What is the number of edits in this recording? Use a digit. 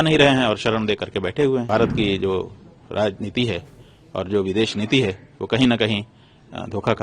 1